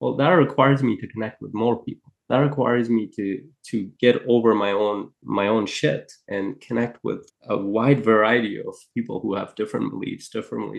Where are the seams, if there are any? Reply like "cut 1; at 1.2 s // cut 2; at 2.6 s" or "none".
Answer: cut 1; at 5.2 s // cut 2; at 6.2 s // cut 3; at 7.3 s